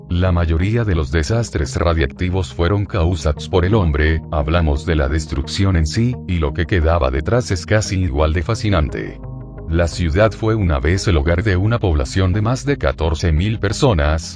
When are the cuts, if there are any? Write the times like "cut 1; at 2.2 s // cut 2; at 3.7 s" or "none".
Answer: cut 1; at 11.8 s